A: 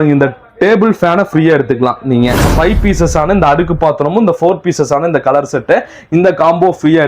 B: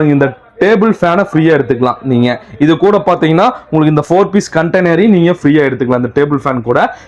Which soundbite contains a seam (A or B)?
A